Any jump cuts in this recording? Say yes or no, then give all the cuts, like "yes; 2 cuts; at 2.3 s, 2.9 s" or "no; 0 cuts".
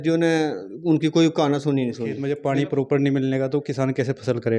yes; 1 cut; at 2.2 s